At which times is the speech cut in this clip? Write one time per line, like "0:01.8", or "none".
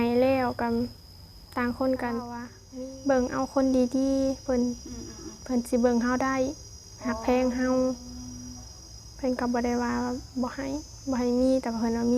0:02.6